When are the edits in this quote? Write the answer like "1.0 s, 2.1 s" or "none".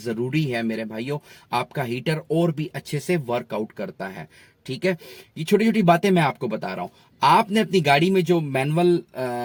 none